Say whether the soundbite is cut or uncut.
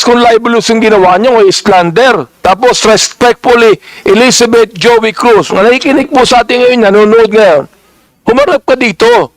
cut